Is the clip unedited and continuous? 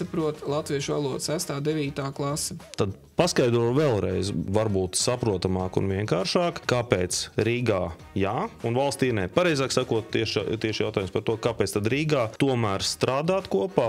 no; 2 cuts; at 2.6 s, 4.5 s

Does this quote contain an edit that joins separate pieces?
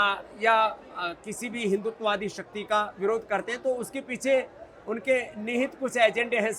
no; 0 cuts

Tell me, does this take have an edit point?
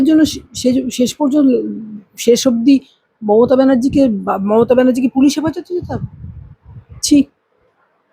no; 0 cuts

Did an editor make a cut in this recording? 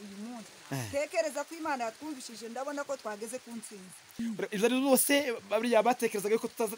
yes; 1 cut; at 4.1 s

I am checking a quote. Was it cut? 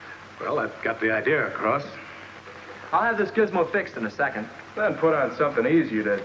yes; 1 cut; at 1.9 s

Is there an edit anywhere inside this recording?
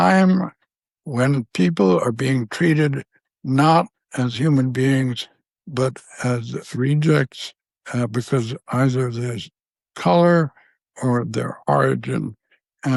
no; 0 cuts

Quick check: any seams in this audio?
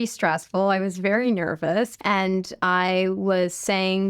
yes; 1 cut; at 2.0 s

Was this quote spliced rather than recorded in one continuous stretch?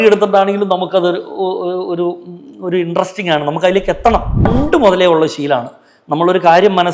yes; 1 cut; at 4.5 s

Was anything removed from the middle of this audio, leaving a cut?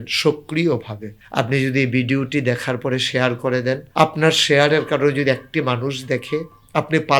yes; 1 cut; at 3.9 s

